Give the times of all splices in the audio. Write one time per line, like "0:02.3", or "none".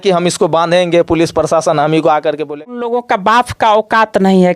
0:02.6